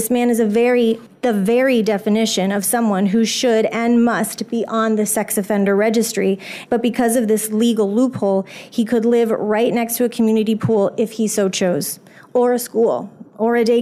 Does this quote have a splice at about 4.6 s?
no; 2 cuts; at 1.1 s, 6.5 s

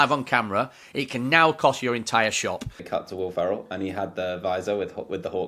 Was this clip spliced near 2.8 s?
yes; 1 cut; at 2.8 s

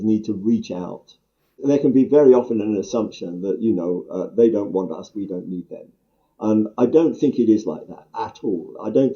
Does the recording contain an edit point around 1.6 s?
yes; 1 cut; at 1.6 s

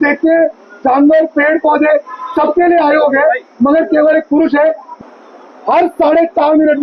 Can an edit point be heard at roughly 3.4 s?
no; 1 cut; at 4.9 s

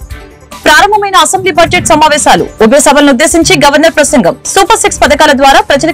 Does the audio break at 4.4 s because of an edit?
no; 0 cuts

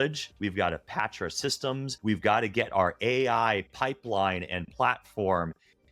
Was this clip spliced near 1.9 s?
yes; 1 cut; at 1.9 s

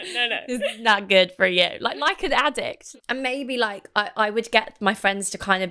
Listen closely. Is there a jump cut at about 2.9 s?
yes; 1 cut; at 2.9 s

